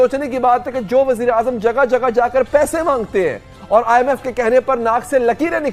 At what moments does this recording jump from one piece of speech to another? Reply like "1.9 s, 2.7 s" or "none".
none